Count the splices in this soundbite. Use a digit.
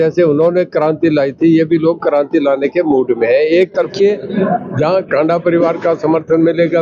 1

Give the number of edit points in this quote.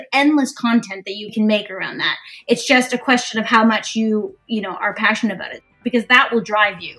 2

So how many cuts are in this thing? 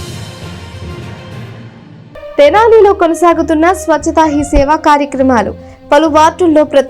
1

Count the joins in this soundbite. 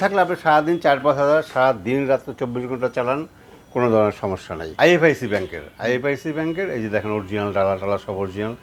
1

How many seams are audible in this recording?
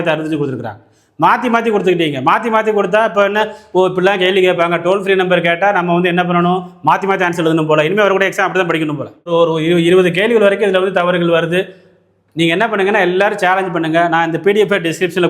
1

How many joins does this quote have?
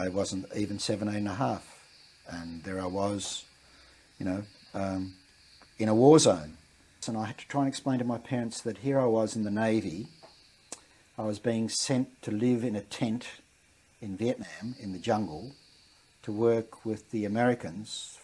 1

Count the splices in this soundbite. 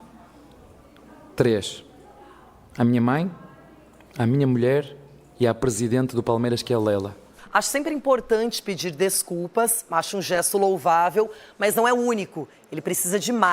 1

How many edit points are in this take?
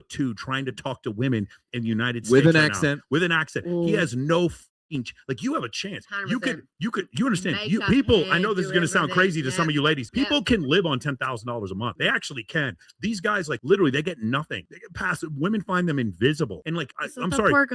0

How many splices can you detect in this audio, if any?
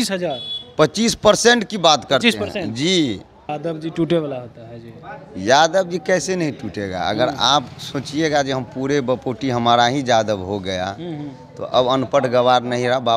1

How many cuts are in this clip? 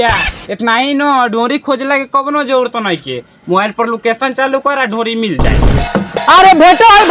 1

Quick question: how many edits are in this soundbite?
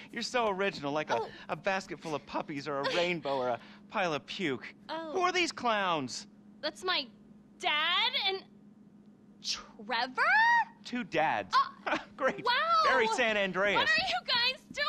0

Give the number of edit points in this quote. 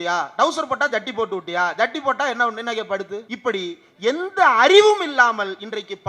1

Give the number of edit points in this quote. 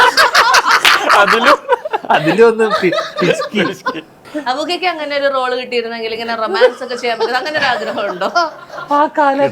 0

